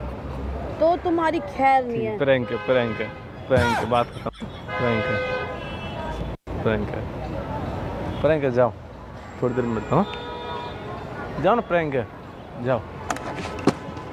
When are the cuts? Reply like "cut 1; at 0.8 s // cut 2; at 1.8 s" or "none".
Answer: none